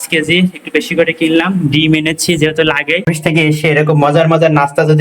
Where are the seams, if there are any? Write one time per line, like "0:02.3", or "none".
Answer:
0:03.0